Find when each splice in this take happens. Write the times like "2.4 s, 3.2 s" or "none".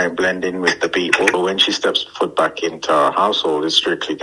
1.3 s